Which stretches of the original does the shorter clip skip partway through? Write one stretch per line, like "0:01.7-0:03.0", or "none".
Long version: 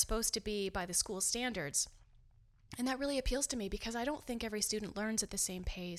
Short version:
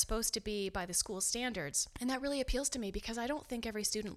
0:01.8-0:02.6

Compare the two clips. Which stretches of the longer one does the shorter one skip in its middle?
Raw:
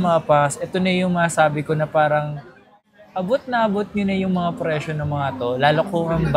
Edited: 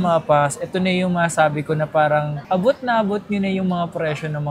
0:02.4-0:03.0

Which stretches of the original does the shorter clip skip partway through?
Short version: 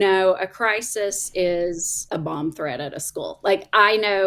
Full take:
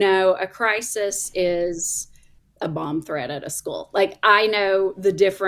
0:01.9-0:02.4

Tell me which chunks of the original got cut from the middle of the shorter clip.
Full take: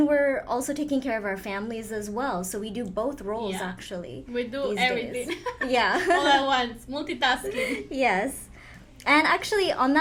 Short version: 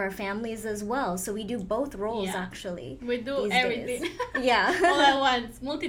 none

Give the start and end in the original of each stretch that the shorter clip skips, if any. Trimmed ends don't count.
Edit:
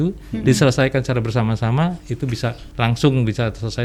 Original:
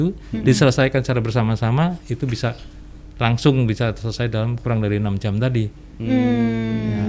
0:02.6-0:03.1

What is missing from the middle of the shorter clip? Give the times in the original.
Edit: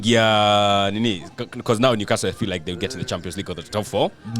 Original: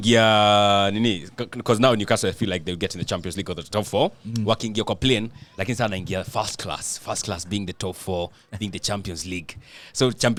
none

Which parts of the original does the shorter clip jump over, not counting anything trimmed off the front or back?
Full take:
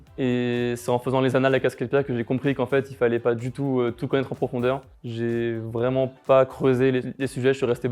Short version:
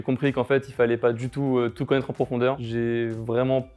0:04.9-0:05.1

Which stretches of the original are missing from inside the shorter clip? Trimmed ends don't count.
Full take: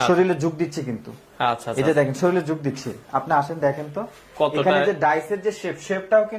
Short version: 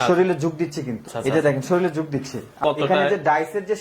0:01.1-0:01.6
0:03.0-0:04.2

